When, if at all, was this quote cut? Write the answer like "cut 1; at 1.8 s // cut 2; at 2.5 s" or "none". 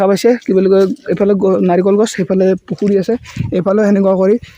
none